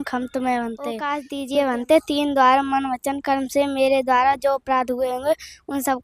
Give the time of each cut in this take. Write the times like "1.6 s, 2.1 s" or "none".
1.2 s